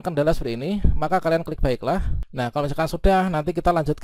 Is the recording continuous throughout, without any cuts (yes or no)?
no